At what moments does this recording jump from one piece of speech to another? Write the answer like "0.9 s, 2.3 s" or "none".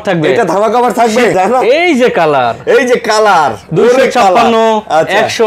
1.3 s